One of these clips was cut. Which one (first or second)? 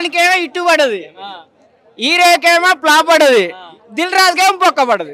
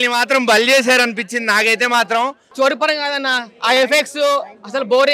second